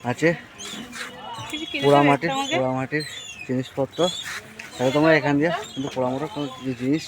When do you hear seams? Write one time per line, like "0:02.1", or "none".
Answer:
none